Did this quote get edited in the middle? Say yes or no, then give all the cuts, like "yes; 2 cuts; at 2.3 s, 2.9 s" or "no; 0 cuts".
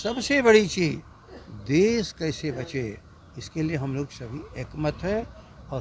no; 0 cuts